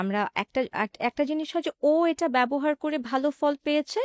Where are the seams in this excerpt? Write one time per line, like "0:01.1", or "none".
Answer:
none